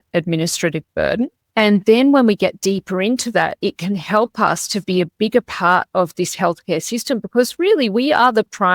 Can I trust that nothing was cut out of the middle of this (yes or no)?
yes